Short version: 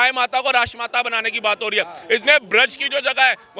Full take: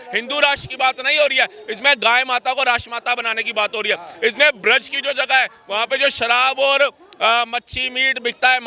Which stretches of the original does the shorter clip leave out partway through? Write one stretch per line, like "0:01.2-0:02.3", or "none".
none